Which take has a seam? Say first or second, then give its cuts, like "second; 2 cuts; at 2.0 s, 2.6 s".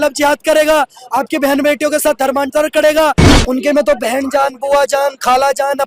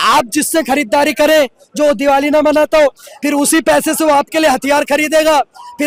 first; 1 cut; at 3.3 s